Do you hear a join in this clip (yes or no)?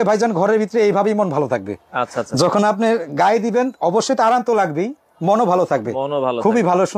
no